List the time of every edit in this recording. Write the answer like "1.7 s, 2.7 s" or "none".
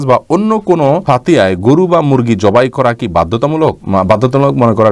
1.0 s, 3.8 s

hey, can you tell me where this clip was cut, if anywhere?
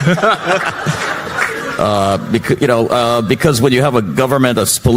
none

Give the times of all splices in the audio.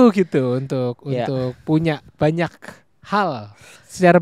2.1 s

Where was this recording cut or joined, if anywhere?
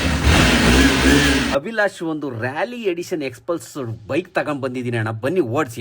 1.5 s

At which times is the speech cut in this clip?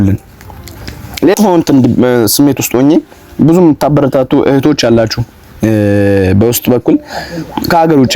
1.3 s

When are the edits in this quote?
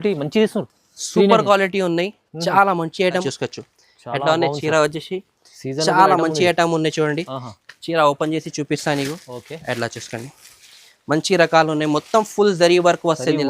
3.2 s

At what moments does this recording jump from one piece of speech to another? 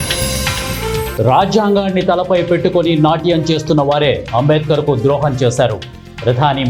1.1 s

